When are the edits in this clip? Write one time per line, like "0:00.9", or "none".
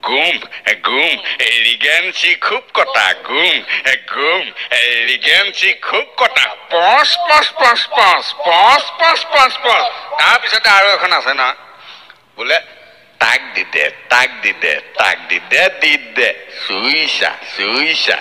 none